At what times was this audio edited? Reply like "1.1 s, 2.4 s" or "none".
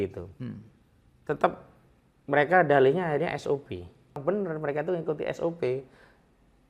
4.2 s